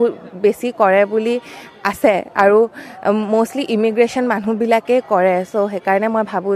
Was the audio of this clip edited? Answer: no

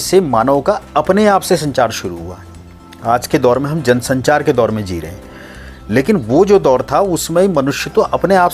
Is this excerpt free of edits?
yes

